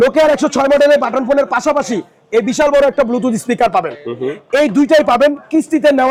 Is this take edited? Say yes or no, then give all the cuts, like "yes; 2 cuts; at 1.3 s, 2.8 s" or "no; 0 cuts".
no; 0 cuts